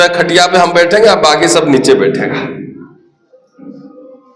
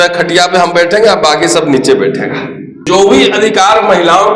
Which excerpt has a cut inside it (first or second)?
second